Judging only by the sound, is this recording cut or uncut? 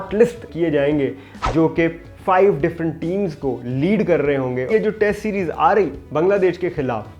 cut